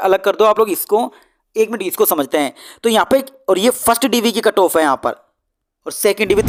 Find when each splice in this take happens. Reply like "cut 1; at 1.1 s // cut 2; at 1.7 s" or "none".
none